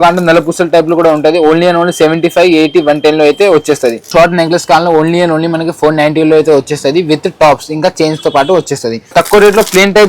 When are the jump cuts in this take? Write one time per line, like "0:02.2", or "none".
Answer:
0:04.1
0:09.1